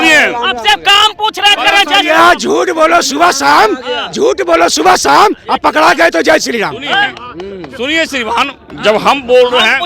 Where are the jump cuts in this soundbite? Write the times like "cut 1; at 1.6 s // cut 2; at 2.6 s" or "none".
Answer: none